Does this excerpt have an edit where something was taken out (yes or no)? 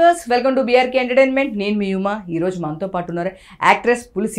no